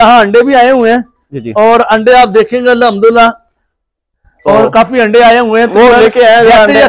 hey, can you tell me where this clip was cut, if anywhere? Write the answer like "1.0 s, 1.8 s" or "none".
none